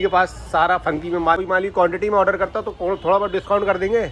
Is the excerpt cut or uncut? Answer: cut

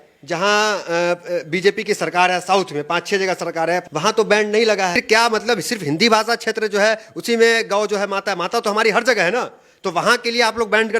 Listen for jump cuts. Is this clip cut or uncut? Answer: cut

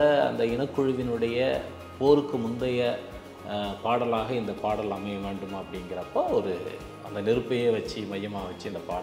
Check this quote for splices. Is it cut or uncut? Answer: uncut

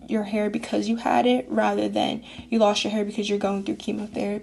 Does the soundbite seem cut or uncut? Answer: uncut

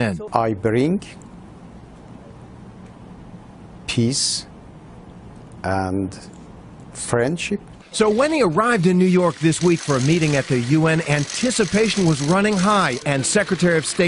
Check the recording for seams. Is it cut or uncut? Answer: cut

